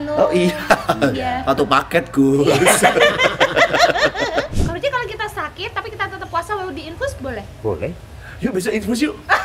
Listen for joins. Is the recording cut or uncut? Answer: cut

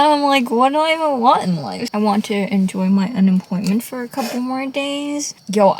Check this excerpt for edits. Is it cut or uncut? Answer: cut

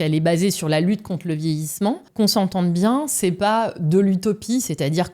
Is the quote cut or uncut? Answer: cut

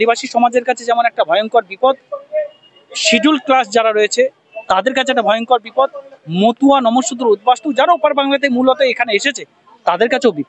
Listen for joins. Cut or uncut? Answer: uncut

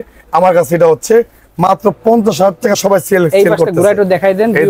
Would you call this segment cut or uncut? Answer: uncut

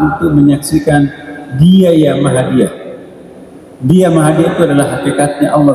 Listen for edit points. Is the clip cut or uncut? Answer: uncut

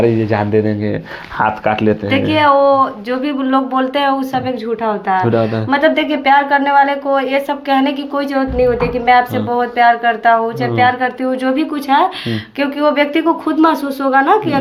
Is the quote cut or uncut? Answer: uncut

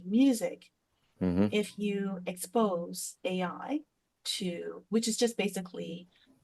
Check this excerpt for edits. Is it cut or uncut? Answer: uncut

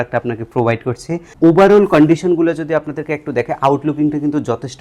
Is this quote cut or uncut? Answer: cut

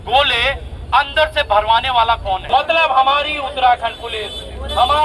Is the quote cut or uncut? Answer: cut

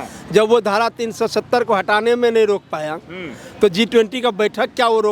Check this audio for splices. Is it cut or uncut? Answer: uncut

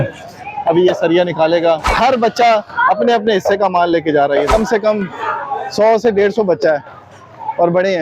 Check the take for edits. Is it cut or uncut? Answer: cut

